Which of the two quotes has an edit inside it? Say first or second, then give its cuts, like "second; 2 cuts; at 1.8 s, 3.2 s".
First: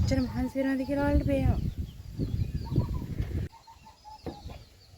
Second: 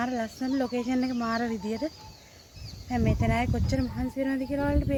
first; 1 cut; at 3.5 s